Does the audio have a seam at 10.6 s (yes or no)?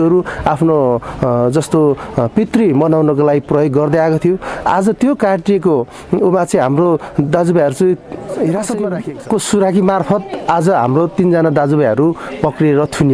no